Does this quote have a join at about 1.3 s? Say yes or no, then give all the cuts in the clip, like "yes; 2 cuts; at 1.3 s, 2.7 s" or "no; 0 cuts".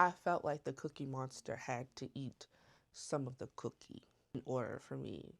no; 1 cut; at 4.3 s